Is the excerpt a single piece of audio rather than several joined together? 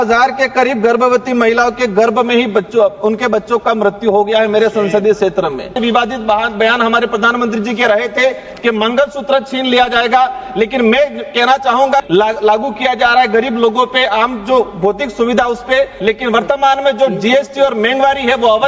no; 3 cuts; at 5.8 s, 12.0 s, 15.9 s

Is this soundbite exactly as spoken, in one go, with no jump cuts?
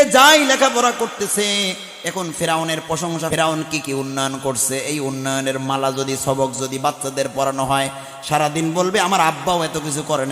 no; 1 cut; at 3.3 s

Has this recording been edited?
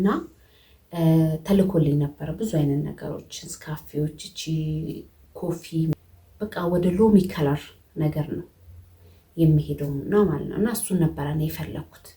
yes; 1 cut; at 5.9 s

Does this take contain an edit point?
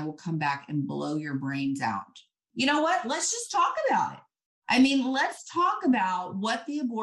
yes; 1 cut; at 2.5 s

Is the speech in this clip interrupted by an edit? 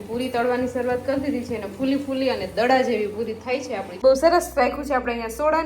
yes; 1 cut; at 3.9 s

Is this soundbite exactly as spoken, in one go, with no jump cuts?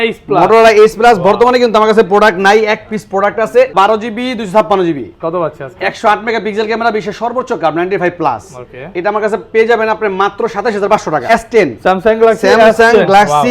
no; 2 cuts; at 3.7 s, 11.3 s

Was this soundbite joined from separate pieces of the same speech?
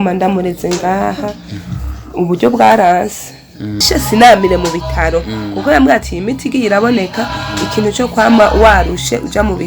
yes; 1 cut; at 3.8 s

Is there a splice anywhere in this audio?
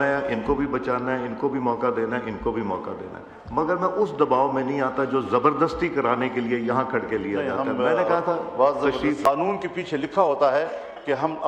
no; 0 cuts

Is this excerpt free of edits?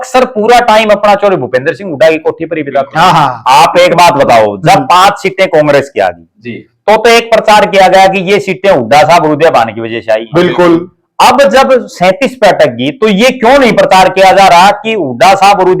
no; 1 cut; at 3.4 s

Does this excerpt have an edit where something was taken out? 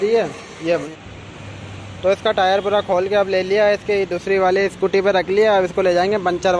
yes; 1 cut; at 0.9 s

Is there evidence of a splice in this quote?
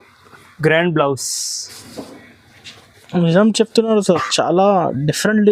no; 0 cuts

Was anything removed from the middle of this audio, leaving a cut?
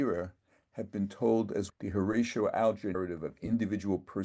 yes; 2 cuts; at 1.7 s, 3.0 s

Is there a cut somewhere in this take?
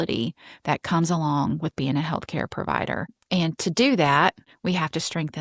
yes; 2 cuts; at 3.2 s, 4.5 s

